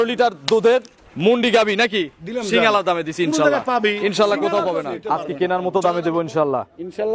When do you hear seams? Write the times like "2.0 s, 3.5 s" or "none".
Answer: 5.0 s